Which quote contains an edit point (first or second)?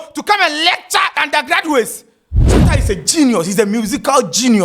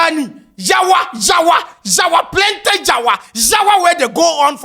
first